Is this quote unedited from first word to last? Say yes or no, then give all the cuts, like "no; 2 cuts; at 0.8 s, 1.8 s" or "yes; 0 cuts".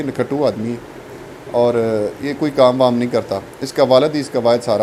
yes; 0 cuts